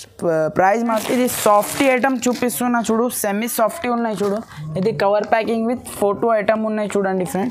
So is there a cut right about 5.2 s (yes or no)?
no